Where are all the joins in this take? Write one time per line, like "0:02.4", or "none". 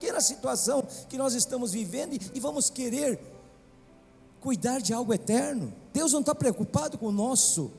0:05.9